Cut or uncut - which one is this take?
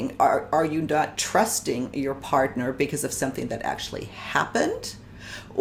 uncut